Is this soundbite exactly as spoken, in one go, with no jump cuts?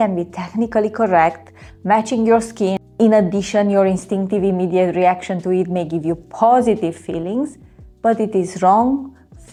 yes; 0 cuts

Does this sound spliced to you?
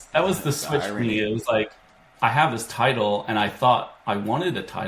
no; 0 cuts

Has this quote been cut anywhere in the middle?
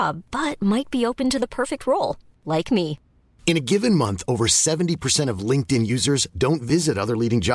no; 0 cuts

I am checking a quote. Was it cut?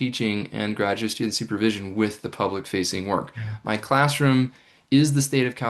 no; 0 cuts

